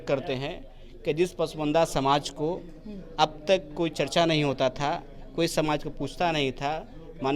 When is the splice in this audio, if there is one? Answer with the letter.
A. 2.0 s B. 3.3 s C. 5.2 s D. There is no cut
D